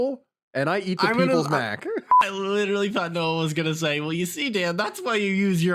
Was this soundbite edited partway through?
yes; 1 cut; at 2.2 s

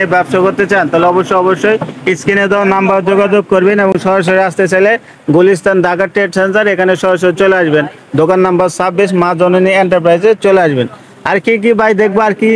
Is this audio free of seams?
yes; 0 cuts

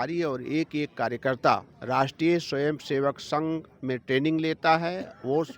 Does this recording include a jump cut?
yes; 1 cut; at 1.7 s

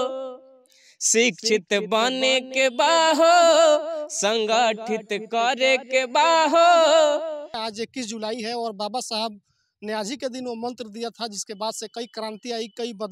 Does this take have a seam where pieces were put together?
yes; 1 cut; at 7.6 s

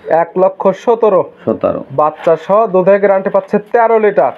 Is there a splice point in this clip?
no; 0 cuts

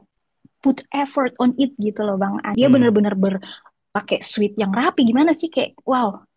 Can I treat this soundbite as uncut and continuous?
no; 1 cut; at 2.4 s

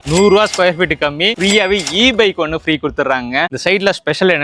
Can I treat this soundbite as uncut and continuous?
no; 2 cuts; at 1.4 s, 3.5 s

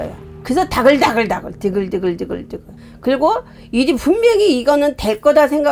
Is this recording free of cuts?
yes; 0 cuts

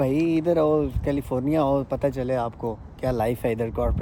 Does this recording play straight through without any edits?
yes; 0 cuts

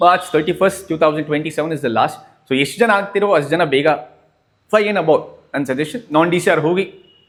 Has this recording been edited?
no; 0 cuts

